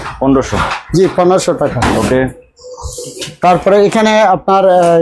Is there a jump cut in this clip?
no; 0 cuts

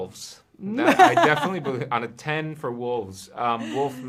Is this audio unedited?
yes; 0 cuts

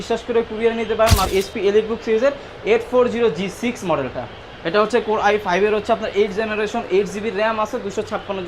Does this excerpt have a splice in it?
yes; 1 cut; at 1.3 s

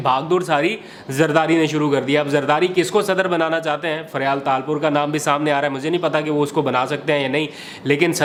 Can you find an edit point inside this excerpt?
no; 0 cuts

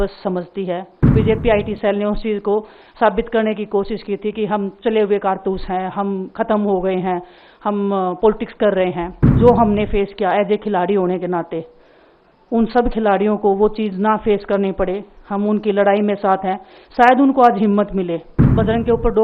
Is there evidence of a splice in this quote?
yes; 3 cuts; at 1.1 s, 9.4 s, 18.4 s

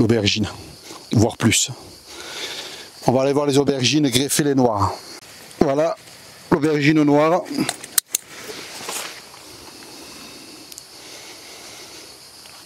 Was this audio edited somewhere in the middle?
no; 0 cuts

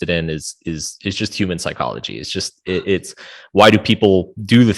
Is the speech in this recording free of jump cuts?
yes; 0 cuts

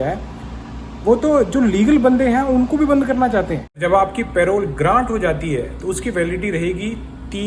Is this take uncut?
no; 1 cut; at 3.6 s

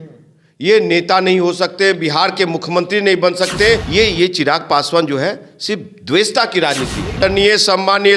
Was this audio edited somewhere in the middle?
yes; 2 cuts; at 3.9 s, 7.2 s

